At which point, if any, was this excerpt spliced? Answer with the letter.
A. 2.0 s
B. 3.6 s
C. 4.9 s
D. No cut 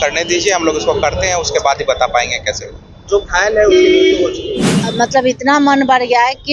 C